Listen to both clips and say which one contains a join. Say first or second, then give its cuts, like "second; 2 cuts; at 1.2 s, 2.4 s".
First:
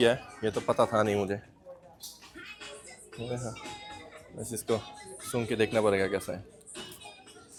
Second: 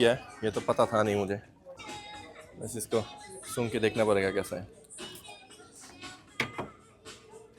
second; 1 cut; at 1.8 s